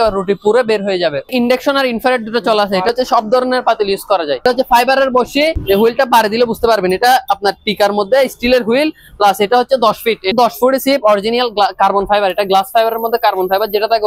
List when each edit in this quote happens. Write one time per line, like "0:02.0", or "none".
0:01.3
0:02.9
0:04.4
0:05.6
0:10.3

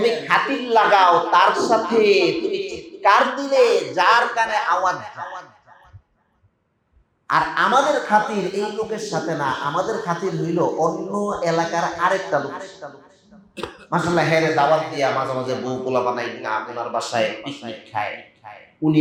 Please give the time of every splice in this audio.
none

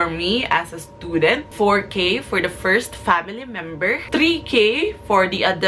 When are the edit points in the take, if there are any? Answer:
0:01.5
0:04.0

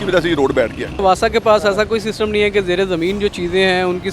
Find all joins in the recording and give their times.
0:01.0

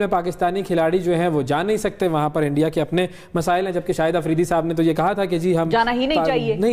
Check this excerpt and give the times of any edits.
none

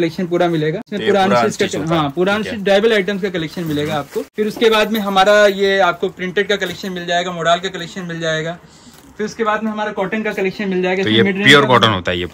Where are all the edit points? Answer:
0:00.9
0:04.3

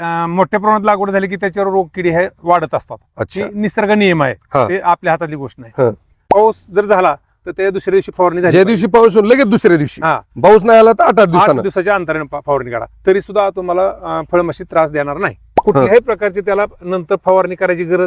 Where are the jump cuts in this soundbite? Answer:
0:06.2
0:15.5

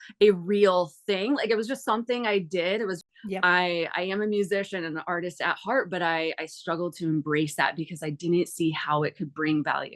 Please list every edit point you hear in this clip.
0:03.0

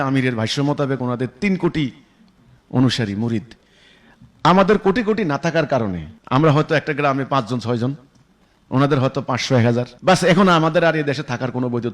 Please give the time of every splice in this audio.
0:06.1
0:09.9

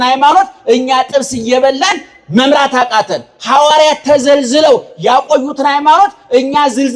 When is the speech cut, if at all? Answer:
none

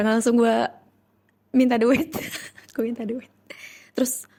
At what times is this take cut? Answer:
none

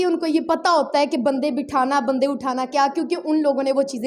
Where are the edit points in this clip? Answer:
none

